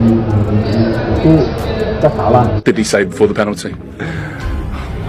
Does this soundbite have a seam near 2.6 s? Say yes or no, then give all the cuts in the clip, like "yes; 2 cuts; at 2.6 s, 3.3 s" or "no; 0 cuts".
yes; 1 cut; at 2.6 s